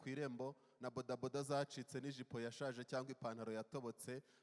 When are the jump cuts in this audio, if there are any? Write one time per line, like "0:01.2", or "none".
none